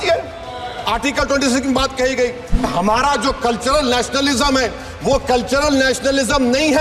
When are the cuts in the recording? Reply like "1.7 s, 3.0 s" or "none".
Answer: 2.6 s